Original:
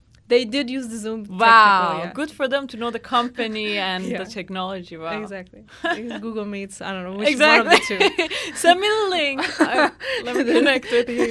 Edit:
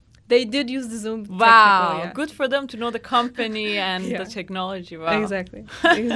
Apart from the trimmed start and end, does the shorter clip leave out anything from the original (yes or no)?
no